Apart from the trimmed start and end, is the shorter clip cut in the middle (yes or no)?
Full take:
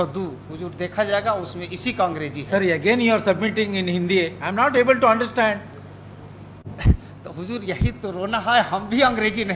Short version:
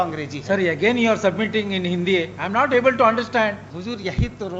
yes